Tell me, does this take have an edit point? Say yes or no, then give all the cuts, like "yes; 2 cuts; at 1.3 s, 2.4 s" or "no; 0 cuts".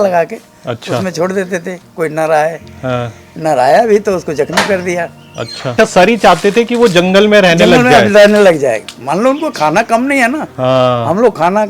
no; 0 cuts